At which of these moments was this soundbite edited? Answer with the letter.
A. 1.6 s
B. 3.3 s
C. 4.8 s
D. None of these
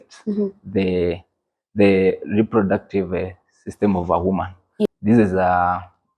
C